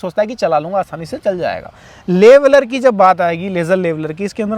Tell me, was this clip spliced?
no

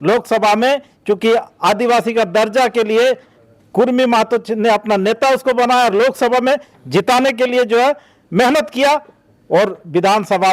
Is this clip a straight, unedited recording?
yes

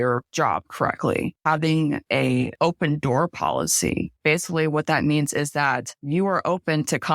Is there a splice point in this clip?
yes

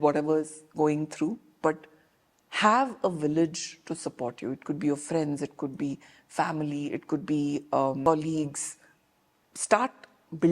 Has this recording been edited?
yes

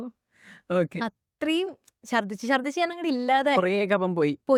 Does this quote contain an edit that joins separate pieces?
no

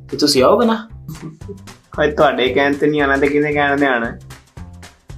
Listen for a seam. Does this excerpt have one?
no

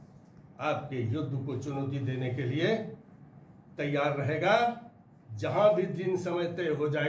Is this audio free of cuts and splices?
yes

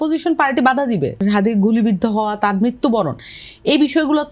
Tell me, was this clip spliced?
yes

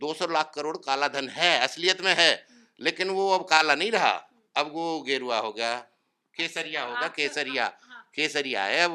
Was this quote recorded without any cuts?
yes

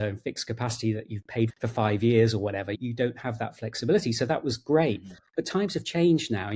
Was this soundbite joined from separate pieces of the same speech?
yes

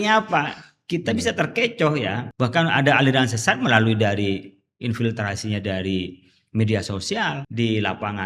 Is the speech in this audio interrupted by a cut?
yes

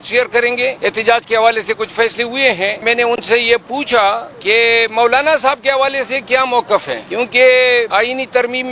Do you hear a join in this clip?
yes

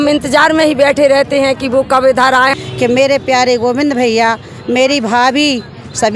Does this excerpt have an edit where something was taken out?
yes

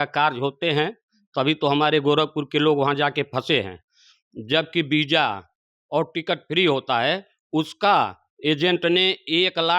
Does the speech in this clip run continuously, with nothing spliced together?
yes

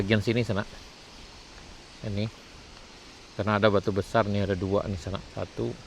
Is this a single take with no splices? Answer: yes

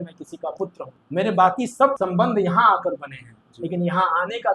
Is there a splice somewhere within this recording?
yes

